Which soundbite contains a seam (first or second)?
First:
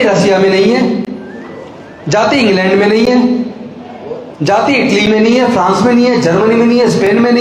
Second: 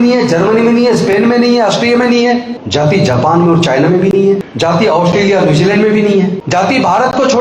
second